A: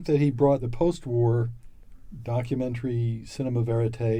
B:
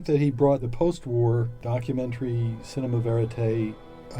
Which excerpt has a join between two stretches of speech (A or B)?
B